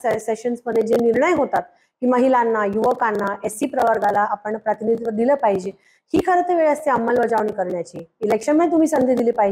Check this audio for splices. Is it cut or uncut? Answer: uncut